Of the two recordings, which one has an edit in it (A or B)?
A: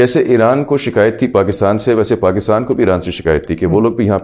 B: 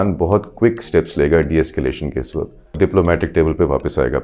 B